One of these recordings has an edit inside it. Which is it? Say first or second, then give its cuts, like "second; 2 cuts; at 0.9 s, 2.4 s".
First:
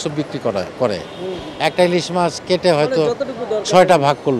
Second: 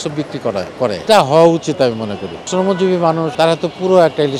second; 2 cuts; at 1.0 s, 2.4 s